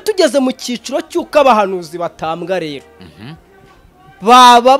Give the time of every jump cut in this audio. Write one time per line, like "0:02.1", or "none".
none

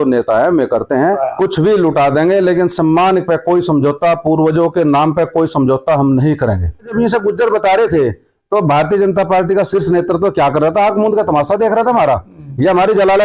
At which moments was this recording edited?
0:01.3
0:06.9

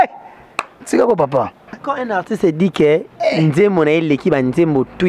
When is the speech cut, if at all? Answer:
0:01.9

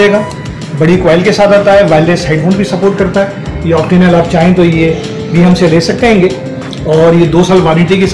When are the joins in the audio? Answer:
none

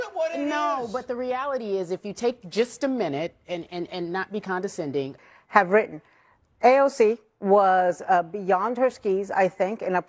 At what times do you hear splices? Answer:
0:05.2

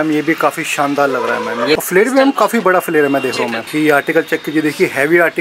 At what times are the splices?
0:01.8
0:03.6

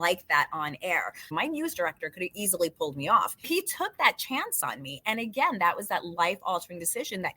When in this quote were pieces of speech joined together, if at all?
0:01.2
0:03.5

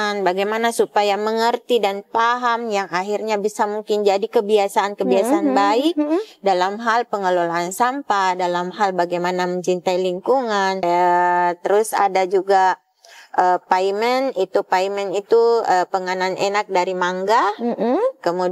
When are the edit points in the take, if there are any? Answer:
0:10.8

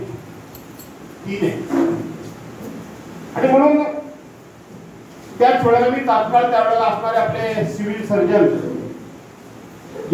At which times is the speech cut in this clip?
none

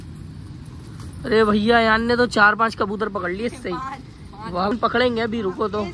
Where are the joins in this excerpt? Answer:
0:04.6

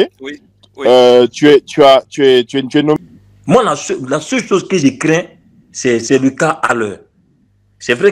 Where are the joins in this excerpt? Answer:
0:03.0

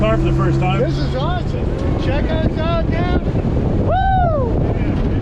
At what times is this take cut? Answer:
0:01.3

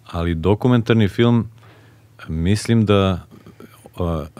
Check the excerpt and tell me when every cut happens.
none

